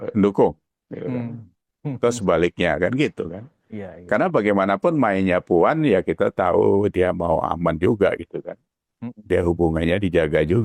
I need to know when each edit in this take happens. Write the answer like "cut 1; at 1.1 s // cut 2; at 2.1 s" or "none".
none